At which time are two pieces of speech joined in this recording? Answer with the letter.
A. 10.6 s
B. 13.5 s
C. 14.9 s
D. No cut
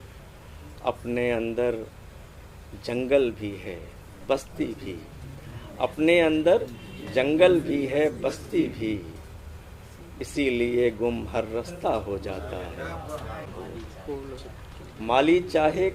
B